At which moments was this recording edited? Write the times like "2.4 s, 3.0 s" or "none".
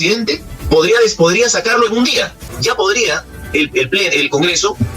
2.5 s

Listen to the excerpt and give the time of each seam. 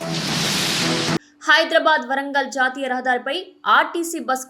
none

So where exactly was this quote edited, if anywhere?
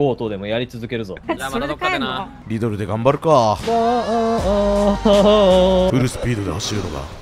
1.2 s, 2.3 s, 5.9 s

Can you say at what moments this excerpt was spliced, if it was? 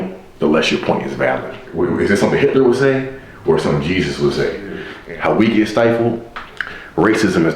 1.6 s, 4.9 s

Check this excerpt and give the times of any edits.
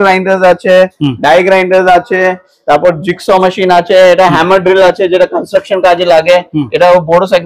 none

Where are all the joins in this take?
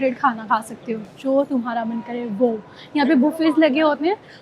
none

